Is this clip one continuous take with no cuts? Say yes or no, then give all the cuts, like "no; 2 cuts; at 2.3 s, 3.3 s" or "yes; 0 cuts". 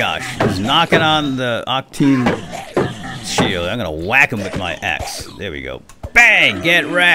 yes; 0 cuts